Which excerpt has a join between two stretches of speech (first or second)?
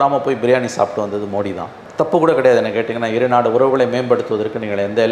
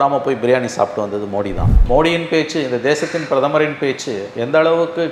second